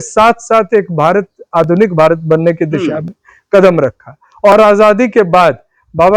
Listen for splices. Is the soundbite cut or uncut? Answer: uncut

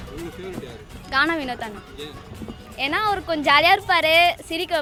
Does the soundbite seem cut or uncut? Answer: uncut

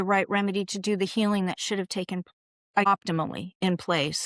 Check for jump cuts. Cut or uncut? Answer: cut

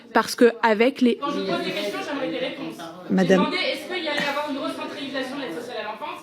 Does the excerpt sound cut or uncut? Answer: cut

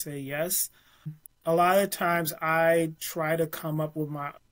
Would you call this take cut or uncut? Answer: cut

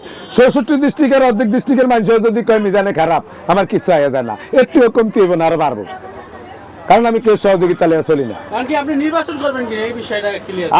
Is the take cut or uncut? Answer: uncut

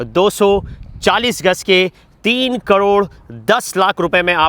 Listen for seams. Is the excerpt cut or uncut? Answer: uncut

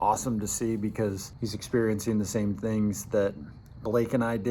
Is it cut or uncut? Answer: cut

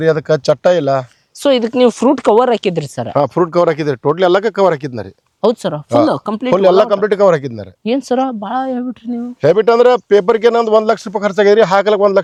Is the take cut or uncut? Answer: uncut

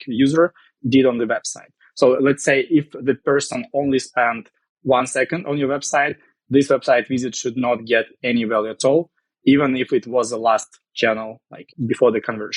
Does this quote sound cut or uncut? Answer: cut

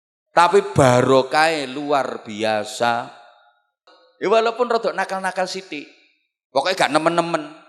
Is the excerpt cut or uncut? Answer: cut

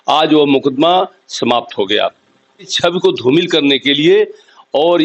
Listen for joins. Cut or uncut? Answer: cut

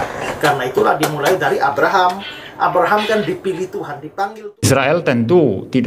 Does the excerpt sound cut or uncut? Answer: cut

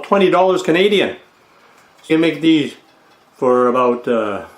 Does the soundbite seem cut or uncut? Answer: cut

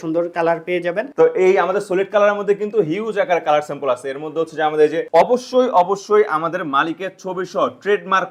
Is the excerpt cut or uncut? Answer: cut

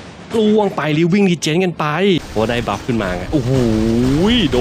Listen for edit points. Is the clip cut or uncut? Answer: cut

